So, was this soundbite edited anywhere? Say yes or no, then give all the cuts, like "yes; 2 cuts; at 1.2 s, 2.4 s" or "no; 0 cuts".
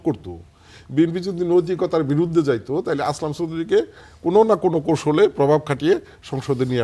no; 0 cuts